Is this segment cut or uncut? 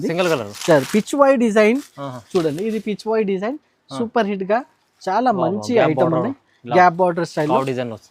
uncut